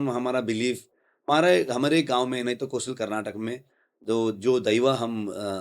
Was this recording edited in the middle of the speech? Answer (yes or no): yes